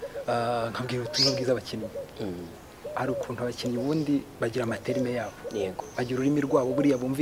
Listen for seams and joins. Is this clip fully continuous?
yes; 0 cuts

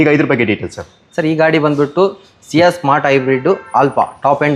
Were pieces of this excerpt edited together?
no; 0 cuts

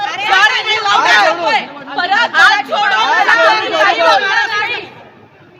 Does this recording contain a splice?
no; 0 cuts

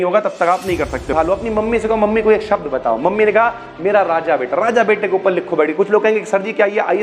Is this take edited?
yes; 1 cut; at 1.1 s

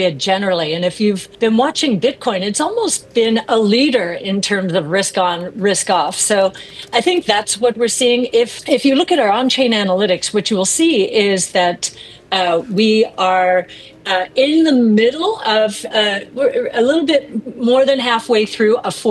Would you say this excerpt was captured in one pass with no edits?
no; 2 cuts; at 1.3 s, 8.6 s

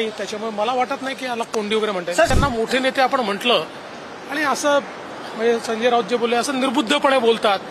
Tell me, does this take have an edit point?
yes; 1 cut; at 2.3 s

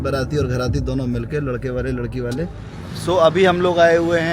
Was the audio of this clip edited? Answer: yes; 1 cut; at 2.8 s

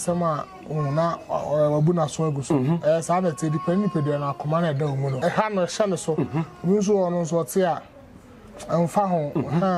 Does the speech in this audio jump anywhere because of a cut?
yes; 1 cut; at 5.1 s

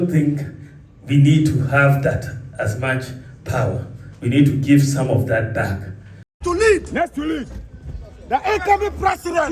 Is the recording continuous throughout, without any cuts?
no; 1 cut; at 6.3 s

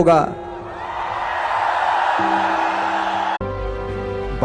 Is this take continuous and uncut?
no; 1 cut; at 3.4 s

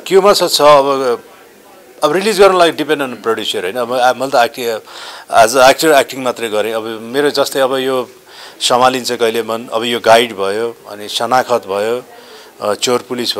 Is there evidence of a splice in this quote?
no; 0 cuts

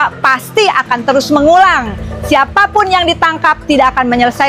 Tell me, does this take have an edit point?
no; 0 cuts

